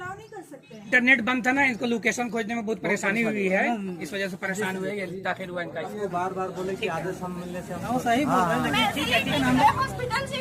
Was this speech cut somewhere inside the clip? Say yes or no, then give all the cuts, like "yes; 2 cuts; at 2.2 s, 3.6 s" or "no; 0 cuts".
yes; 3 cuts; at 0.9 s, 5.9 s, 9.4 s